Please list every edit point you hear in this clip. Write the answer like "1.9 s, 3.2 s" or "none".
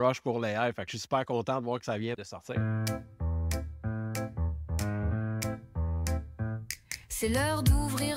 2.6 s